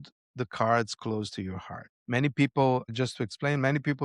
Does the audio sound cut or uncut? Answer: cut